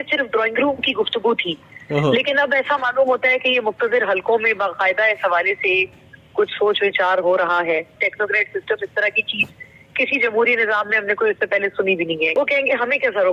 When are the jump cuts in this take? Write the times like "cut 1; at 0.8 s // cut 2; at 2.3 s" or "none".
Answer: cut 1; at 8.0 s // cut 2; at 12.3 s

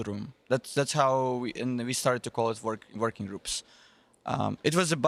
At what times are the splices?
none

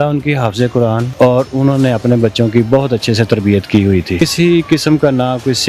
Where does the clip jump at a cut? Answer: cut 1; at 1.1 s // cut 2; at 4.2 s

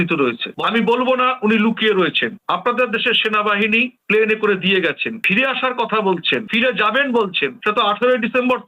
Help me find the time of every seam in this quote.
none

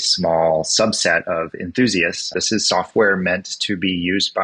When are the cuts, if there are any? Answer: cut 1; at 2.3 s

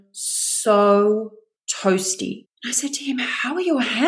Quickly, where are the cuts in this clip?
cut 1; at 2.4 s

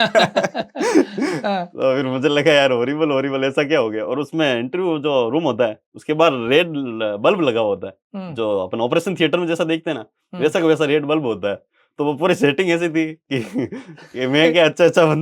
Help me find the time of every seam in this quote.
none

